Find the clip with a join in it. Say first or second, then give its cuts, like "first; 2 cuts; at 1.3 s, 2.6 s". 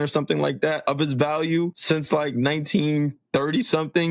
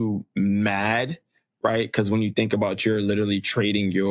first; 2 cuts; at 0.8 s, 1.8 s